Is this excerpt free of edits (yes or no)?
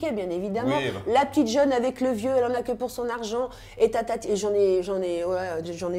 yes